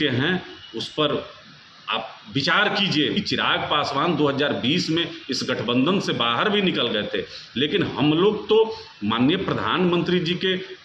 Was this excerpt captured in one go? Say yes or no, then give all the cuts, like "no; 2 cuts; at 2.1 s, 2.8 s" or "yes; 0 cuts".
no; 1 cut; at 3.2 s